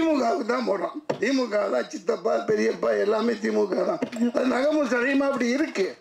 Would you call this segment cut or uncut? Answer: uncut